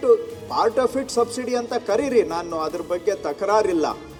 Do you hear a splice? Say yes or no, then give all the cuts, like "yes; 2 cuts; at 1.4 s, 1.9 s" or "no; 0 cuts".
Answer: no; 0 cuts